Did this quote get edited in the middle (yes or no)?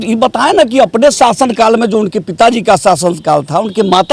no